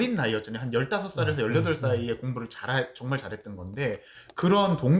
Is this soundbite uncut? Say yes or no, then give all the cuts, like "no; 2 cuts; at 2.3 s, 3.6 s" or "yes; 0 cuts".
yes; 0 cuts